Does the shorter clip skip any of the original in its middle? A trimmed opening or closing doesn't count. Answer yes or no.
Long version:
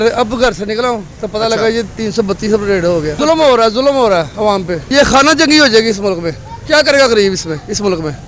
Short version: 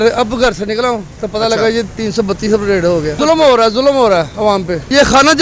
no